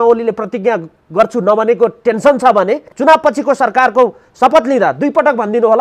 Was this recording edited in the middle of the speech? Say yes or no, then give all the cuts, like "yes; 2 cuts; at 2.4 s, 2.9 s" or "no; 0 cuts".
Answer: yes; 1 cut; at 2.9 s